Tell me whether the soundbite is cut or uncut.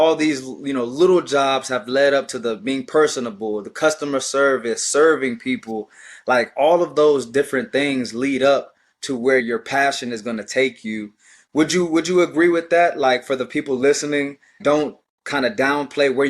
cut